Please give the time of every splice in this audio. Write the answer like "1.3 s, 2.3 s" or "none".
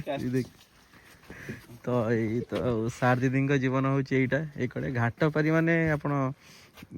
none